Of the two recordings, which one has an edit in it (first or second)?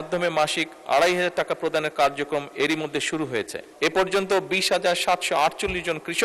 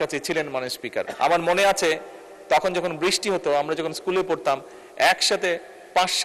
first